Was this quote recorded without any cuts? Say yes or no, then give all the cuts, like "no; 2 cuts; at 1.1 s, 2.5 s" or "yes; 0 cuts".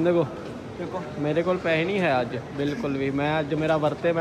yes; 0 cuts